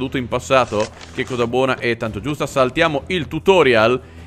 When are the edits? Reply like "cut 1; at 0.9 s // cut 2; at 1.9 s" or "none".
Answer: none